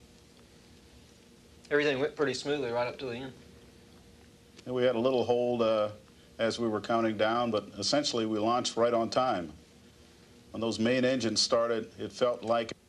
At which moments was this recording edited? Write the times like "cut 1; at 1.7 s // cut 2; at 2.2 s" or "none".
cut 1; at 8.3 s